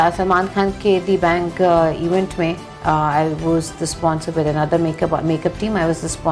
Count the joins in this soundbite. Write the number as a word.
zero